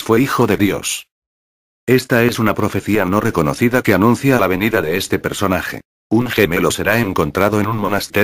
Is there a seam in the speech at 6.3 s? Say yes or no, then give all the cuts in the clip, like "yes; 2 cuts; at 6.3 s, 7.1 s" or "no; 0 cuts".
no; 1 cut; at 0.9 s